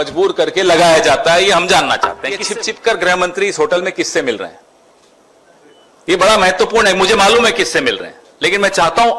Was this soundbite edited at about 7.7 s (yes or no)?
no